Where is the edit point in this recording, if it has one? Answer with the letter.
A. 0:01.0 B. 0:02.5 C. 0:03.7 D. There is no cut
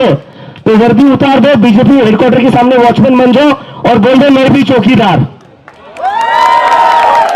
D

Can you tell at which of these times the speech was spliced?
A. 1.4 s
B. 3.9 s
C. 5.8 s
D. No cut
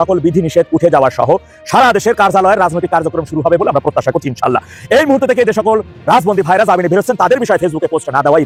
D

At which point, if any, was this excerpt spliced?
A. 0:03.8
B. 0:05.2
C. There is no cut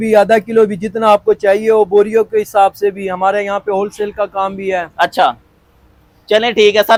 C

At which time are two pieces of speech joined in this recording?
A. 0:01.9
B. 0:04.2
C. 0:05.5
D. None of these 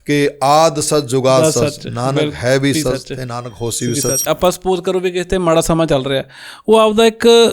B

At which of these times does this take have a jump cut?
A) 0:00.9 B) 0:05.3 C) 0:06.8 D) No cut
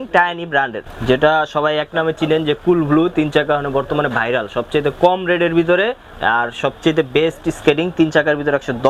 A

